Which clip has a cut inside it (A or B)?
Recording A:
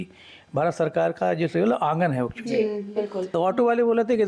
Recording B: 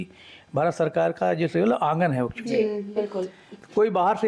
A